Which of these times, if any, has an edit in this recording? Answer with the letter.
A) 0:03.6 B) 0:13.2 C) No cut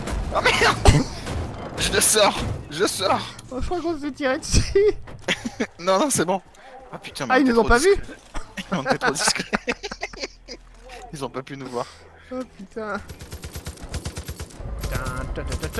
B